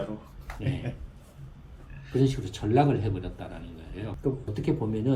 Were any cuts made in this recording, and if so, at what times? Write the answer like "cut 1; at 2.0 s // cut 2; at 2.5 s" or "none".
cut 1; at 4.2 s